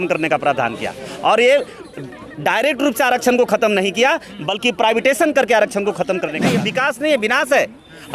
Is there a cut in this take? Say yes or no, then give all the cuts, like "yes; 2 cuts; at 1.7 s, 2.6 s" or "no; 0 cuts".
yes; 1 cut; at 6.5 s